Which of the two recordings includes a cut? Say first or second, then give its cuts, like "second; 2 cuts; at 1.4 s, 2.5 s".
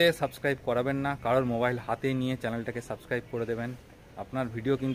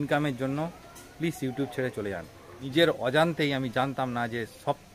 second; 1 cut; at 2.6 s